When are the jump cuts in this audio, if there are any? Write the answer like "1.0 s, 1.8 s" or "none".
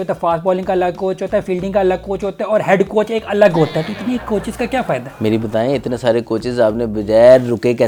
none